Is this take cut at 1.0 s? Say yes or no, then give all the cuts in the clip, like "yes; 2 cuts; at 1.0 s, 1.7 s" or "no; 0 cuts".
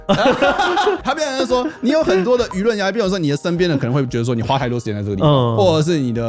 yes; 1 cut; at 1.0 s